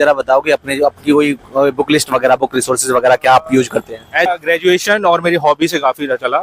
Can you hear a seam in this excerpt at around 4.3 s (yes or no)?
yes